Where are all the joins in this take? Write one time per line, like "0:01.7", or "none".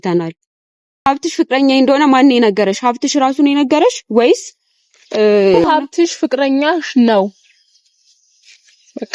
0:01.1
0:05.6